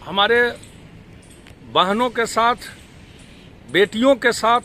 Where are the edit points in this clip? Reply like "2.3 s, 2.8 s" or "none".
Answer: none